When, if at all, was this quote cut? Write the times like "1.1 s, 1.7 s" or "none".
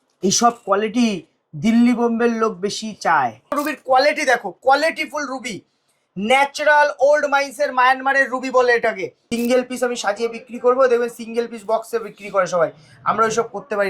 3.6 s, 9.1 s